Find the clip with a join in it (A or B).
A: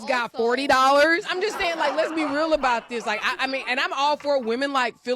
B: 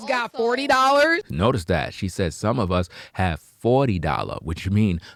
A